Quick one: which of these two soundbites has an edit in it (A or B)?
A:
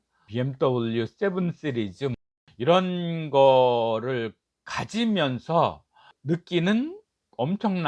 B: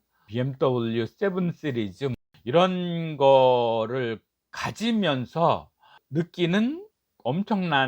B